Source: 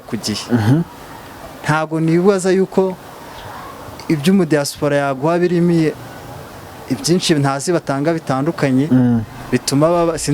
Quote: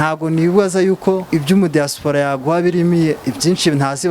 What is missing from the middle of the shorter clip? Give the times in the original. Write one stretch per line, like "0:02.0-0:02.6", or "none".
0:02.9-0:04.0
0:06.0-0:06.8